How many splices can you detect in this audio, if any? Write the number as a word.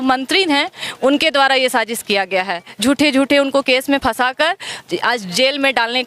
zero